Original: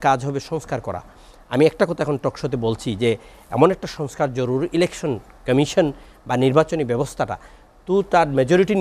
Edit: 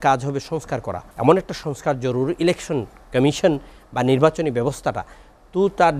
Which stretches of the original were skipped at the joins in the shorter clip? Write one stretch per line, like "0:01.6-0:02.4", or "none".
0:01.0-0:03.4